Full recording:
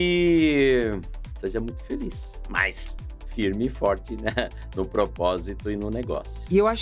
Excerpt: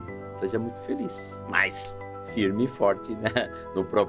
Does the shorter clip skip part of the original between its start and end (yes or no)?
no